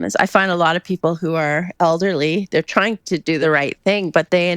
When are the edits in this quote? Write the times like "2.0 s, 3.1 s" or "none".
3.4 s